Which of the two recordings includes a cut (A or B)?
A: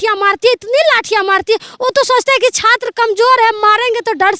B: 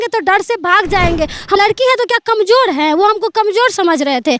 B